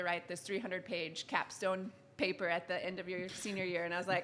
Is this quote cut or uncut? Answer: uncut